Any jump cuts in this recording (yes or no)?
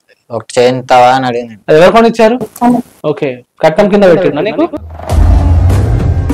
yes